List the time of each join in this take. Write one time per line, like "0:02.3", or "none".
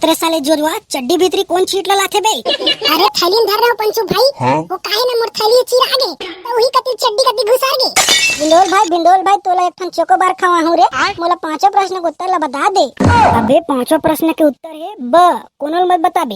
0:07.9

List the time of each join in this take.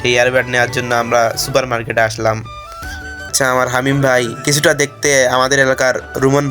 0:03.3

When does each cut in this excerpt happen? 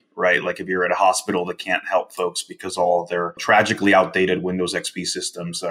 0:03.4

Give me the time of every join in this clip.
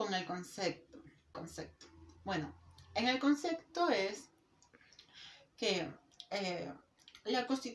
0:01.3

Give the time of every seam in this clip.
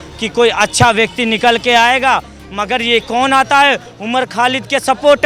none

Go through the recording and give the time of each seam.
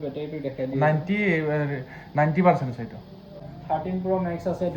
0:03.5

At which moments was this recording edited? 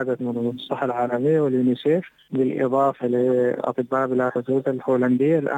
0:02.2

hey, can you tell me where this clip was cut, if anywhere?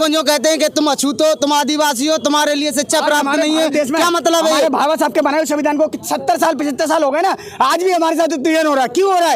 none

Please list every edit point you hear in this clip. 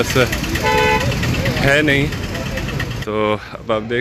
0:02.9

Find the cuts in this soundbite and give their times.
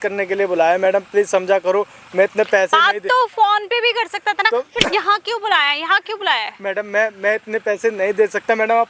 none

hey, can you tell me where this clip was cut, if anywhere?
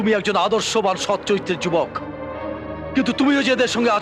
none

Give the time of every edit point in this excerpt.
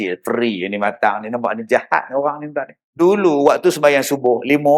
0:02.8

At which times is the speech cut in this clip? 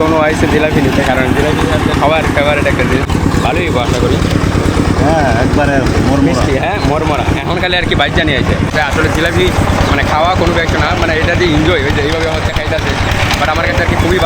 0:03.1
0:08.7

